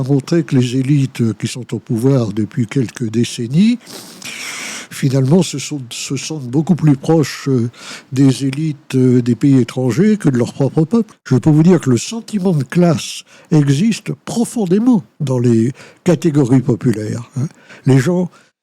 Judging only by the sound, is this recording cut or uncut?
cut